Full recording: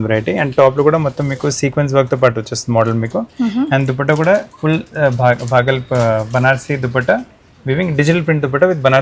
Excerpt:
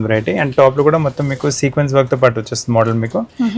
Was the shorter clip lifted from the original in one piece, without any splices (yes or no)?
yes